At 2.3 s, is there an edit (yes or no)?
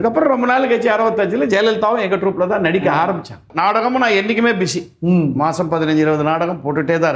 no